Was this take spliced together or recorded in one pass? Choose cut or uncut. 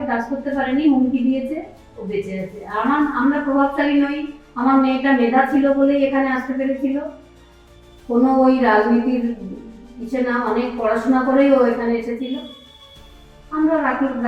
uncut